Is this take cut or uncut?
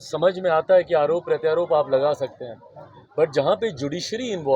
uncut